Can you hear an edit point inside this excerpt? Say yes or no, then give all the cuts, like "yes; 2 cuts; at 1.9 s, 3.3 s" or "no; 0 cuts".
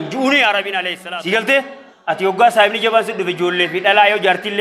yes; 1 cut; at 0.9 s